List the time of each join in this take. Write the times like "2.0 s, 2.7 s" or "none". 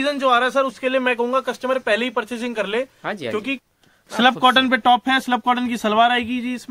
3.6 s